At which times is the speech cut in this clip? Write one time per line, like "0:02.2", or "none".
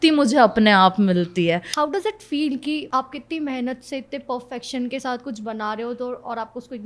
0:01.7
0:02.9